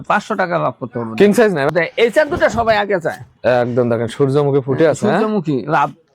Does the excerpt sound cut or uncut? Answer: cut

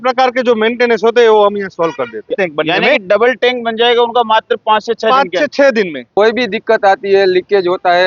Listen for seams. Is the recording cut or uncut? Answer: cut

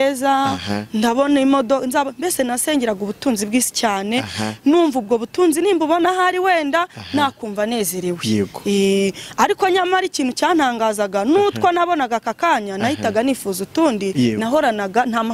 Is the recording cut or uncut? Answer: uncut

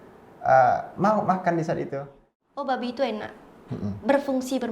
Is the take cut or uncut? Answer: cut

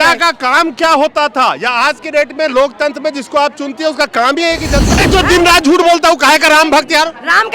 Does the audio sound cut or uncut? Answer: cut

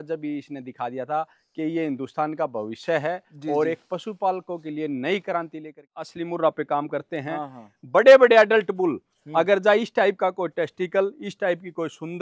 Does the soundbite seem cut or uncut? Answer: cut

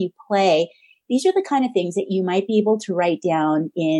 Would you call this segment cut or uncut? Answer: uncut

